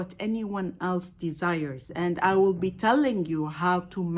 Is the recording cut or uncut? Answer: cut